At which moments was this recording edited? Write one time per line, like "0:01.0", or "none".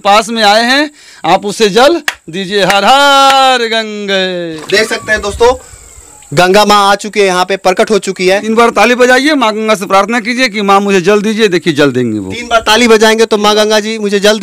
0:04.6
0:08.4